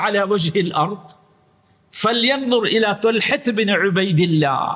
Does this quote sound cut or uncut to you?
uncut